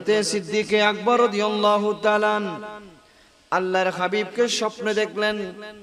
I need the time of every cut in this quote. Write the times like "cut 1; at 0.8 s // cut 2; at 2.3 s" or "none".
none